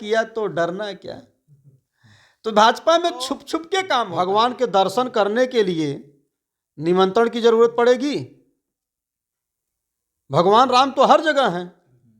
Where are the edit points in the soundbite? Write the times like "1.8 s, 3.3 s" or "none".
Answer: 4.0 s